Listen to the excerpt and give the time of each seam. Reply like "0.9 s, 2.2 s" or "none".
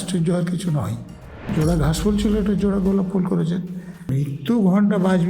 1.5 s, 4.1 s